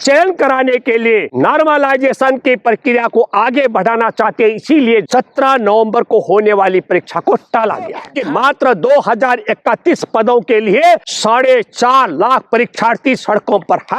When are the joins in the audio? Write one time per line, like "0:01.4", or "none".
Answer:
0:01.3
0:05.1
0:08.1
0:11.1

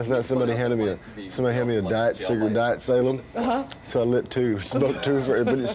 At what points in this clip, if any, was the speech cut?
0:04.6

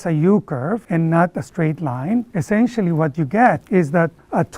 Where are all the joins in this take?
0:00.8
0:02.3
0:03.6

